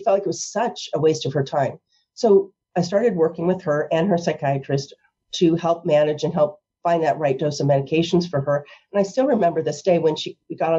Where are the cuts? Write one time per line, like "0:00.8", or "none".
none